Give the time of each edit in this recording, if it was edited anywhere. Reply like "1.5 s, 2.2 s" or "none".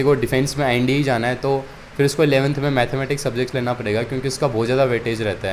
none